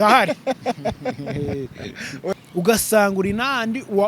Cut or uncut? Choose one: cut